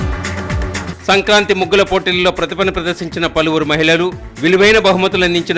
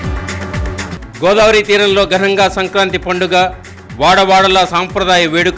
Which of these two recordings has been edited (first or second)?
second